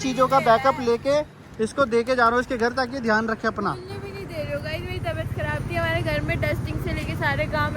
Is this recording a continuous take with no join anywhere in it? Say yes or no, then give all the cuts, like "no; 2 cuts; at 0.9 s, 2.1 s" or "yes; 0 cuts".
yes; 0 cuts